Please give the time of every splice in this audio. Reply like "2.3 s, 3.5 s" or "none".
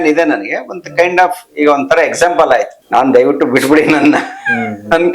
2.8 s